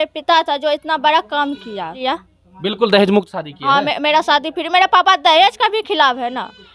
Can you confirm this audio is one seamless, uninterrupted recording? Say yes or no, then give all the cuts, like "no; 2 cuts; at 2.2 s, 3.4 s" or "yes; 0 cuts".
no; 1 cut; at 2.0 s